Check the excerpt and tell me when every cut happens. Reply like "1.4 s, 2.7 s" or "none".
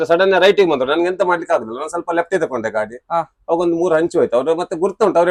none